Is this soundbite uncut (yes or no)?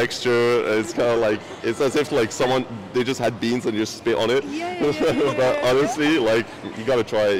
yes